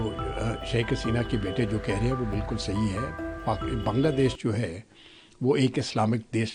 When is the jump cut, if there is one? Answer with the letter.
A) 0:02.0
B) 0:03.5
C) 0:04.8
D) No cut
D